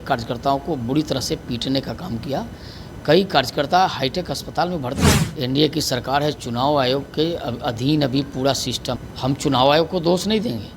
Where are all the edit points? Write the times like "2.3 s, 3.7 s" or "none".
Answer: 5.2 s, 9.1 s